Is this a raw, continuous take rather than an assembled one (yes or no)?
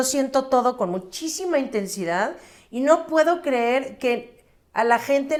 yes